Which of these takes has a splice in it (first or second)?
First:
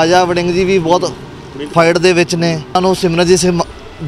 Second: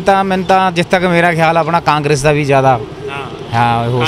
first